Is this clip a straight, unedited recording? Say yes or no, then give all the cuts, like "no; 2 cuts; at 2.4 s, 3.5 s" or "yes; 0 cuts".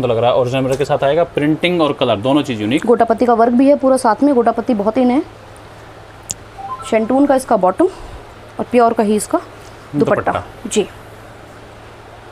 yes; 0 cuts